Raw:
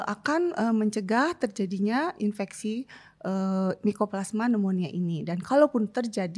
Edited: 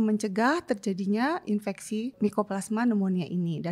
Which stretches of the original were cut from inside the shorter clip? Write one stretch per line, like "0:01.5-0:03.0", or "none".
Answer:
0:02.9-0:03.8

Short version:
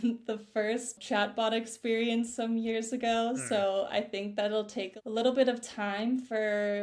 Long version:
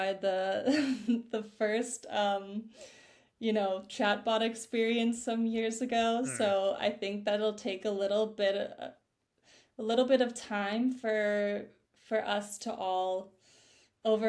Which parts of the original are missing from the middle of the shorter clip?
0:02.0-0:03.9
0:07.7-0:09.6

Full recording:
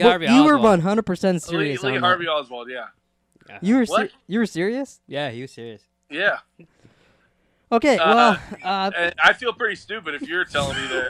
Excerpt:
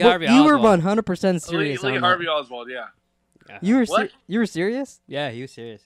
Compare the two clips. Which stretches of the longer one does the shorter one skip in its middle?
none

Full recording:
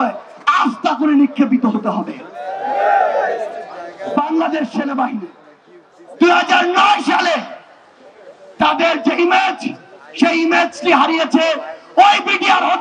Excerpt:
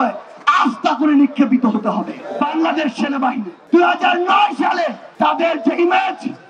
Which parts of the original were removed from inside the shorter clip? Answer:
0:02.2-0:03.9
0:05.3-0:06.0
0:07.5-0:08.4

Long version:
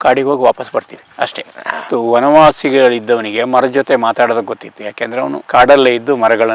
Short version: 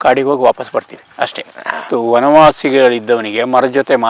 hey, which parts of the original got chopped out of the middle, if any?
none

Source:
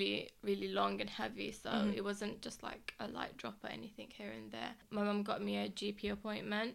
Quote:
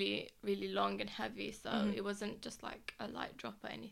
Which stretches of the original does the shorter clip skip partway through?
none

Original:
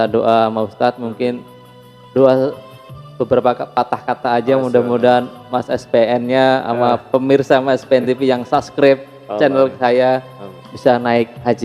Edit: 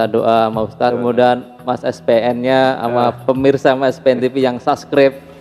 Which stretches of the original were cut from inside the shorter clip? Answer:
0:01.0-0:04.8

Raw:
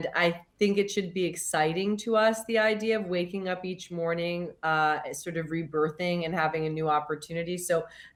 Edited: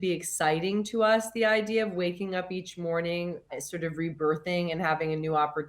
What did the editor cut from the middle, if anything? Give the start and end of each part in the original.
0:04.6-0:05.0

